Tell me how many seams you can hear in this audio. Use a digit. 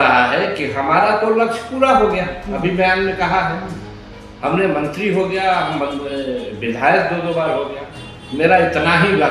0